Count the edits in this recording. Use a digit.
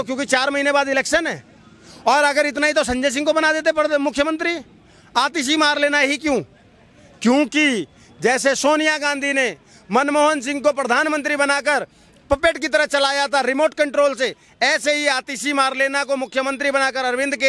0